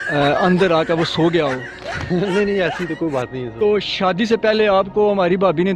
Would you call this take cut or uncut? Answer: cut